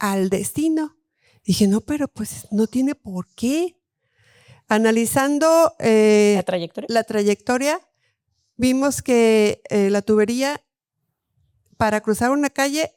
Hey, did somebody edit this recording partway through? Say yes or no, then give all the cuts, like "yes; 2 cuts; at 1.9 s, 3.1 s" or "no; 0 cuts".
no; 0 cuts